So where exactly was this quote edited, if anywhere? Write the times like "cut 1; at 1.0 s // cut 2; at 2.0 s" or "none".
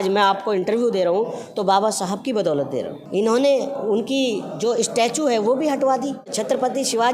cut 1; at 3.0 s // cut 2; at 6.3 s